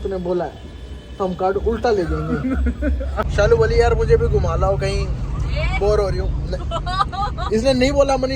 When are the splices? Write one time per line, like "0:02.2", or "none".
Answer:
0:03.2